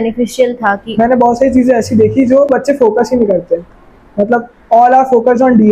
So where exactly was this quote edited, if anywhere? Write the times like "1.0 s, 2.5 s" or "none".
0.8 s, 2.5 s